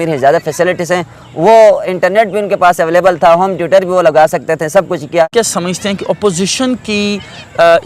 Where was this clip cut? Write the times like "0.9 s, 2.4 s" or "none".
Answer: 5.3 s